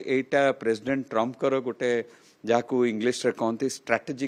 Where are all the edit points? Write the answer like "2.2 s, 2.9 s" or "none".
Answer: none